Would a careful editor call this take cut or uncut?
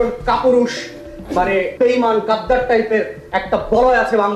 cut